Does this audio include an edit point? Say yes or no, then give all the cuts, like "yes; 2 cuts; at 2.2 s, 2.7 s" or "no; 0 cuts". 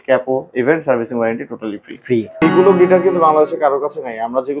yes; 1 cut; at 2.4 s